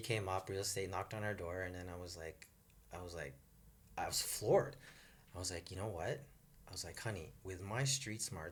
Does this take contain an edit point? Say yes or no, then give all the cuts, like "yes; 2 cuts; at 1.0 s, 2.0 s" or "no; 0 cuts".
no; 0 cuts